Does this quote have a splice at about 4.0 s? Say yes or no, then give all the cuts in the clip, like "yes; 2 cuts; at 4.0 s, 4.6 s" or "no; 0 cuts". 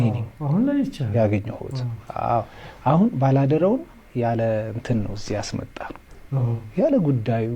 no; 0 cuts